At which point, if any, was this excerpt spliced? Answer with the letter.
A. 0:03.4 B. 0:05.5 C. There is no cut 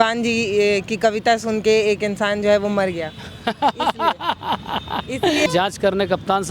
B